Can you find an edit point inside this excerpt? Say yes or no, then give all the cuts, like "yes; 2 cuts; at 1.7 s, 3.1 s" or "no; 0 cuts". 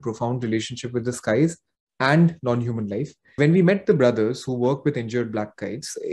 yes; 1 cut; at 3.2 s